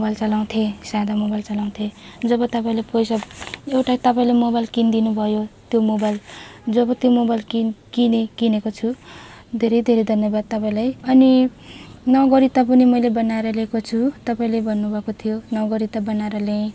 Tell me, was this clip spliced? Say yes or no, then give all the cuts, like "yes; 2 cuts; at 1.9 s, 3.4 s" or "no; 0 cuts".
yes; 1 cut; at 11.0 s